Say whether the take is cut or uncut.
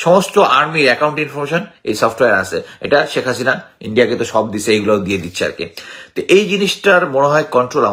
uncut